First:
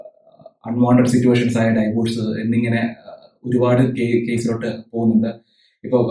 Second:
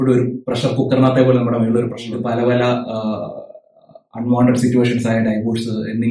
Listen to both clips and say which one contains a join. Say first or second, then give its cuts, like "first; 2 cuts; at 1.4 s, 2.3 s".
second; 1 cut; at 2.1 s